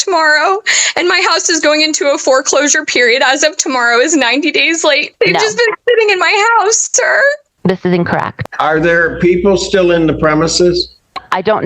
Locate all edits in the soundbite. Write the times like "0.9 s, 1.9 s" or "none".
5.1 s, 8.3 s